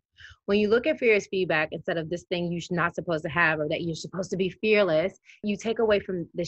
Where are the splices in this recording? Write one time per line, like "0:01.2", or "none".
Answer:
0:05.5